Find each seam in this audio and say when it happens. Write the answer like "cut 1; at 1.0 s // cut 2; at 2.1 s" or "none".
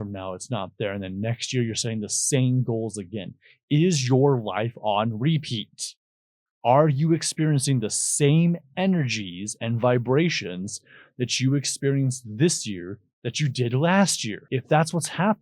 cut 1; at 14.3 s